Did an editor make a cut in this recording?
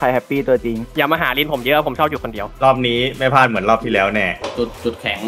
yes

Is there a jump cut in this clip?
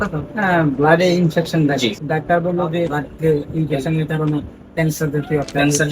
yes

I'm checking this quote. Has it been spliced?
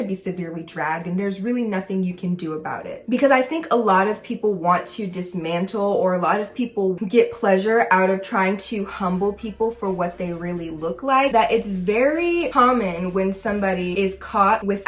no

